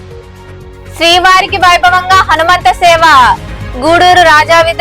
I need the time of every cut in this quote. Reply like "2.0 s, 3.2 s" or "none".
0.9 s

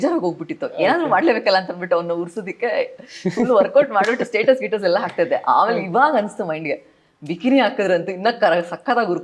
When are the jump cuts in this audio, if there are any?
none

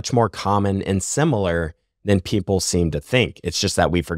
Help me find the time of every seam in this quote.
none

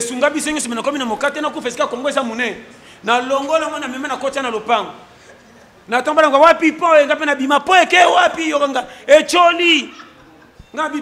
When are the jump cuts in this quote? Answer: none

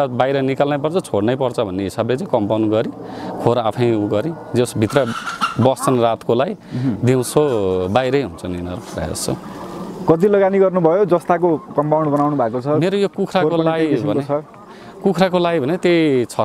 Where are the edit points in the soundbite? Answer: none

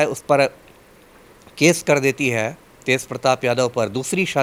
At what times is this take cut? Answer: none

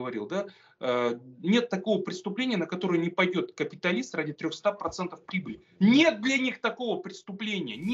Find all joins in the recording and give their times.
none

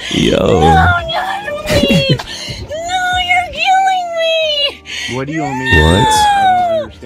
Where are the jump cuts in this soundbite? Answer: none

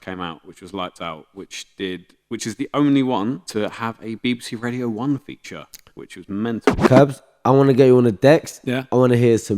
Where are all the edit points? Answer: 6.8 s

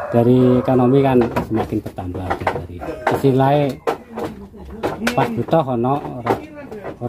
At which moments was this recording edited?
2.8 s

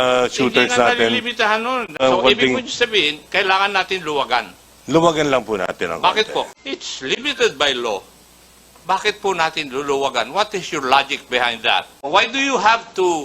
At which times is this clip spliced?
1.9 s, 6.6 s, 12.0 s

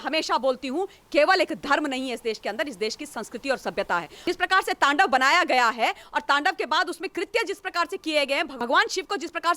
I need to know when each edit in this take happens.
4.1 s, 8.6 s

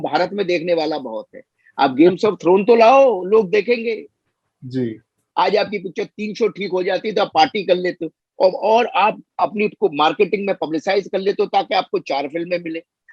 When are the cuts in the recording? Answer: 5.2 s

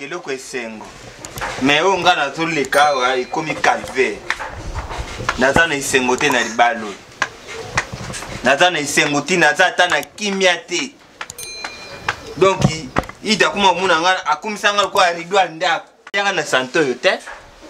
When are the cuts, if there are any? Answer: 16.1 s

